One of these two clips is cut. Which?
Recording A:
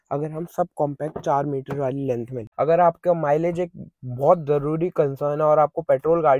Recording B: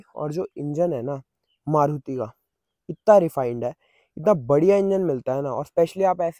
A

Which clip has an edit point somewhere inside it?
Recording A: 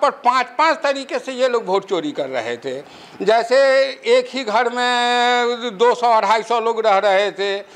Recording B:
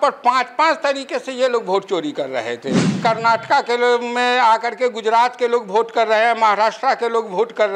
B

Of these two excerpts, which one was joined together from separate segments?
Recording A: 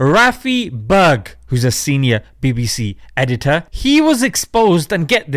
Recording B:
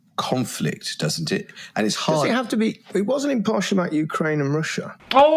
A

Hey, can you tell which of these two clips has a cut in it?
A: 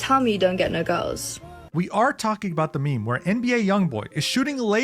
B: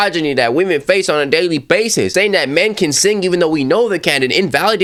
A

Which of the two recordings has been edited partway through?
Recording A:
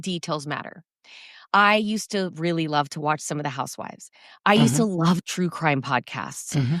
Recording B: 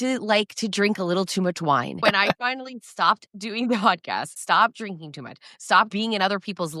B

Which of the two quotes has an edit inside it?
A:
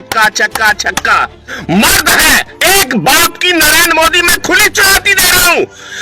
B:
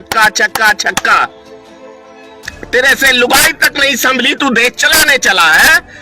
A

